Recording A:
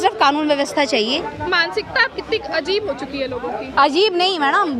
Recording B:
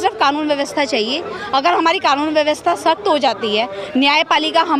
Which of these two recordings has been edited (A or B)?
A